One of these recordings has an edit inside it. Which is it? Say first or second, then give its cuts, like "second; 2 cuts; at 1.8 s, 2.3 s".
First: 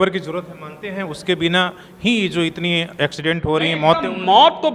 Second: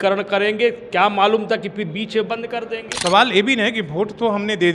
second; 1 cut; at 2.9 s